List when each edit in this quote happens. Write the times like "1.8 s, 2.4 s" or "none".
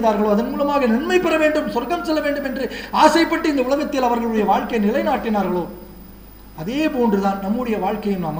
none